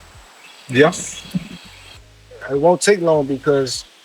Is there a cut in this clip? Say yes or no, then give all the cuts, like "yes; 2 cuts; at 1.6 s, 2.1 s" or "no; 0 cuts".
yes; 1 cut; at 1.9 s